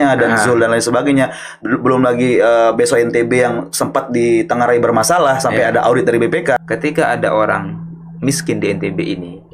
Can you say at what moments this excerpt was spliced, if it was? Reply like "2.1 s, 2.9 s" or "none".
6.6 s